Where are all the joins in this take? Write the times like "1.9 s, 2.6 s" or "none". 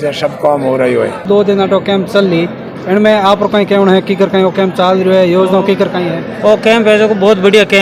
none